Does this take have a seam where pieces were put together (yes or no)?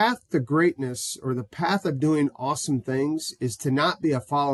no